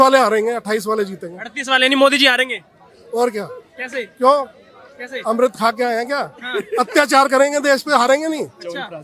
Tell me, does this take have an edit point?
no; 0 cuts

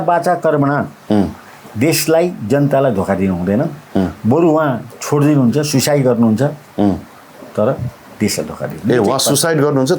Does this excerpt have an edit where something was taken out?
no; 0 cuts

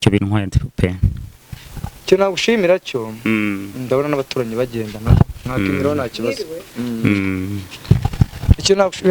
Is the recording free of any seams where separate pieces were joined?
yes; 0 cuts

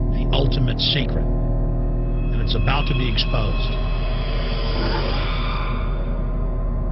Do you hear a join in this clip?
yes; 1 cut; at 3.9 s

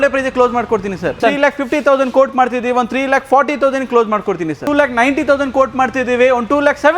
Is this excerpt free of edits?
no; 2 cuts; at 1.2 s, 4.6 s

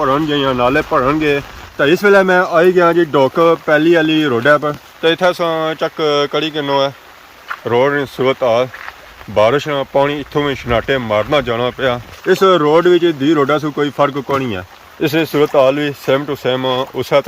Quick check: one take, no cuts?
yes; 0 cuts

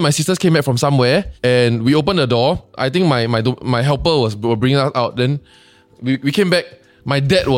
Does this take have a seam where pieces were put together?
no; 0 cuts

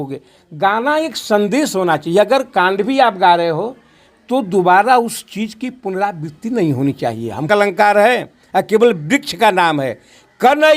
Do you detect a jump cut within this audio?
yes; 1 cut; at 7.5 s

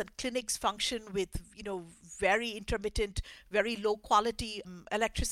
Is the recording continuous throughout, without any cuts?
yes; 0 cuts

